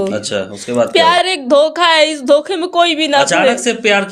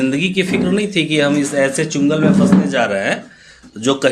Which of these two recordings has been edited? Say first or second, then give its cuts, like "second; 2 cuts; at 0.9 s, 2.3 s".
first; 1 cut; at 1.2 s